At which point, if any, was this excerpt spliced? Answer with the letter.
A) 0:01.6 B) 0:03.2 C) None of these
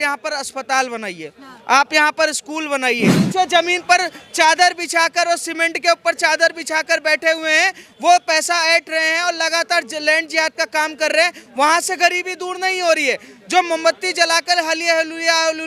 B